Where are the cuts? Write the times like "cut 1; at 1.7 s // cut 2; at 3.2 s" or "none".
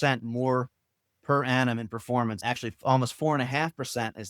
cut 1; at 2.4 s

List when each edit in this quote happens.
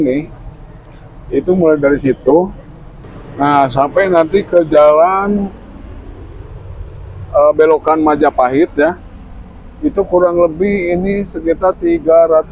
none

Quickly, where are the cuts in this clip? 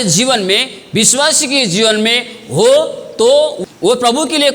cut 1; at 3.6 s

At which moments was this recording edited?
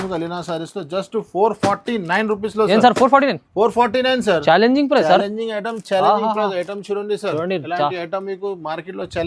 none

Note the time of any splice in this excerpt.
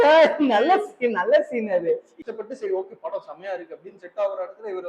cut 1; at 2.2 s

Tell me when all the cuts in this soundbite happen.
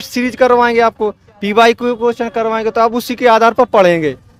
none

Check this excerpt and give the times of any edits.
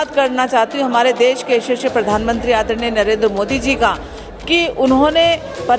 none

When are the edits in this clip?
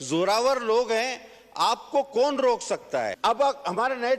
cut 1; at 3.1 s

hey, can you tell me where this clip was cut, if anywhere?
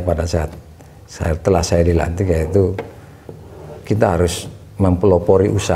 none

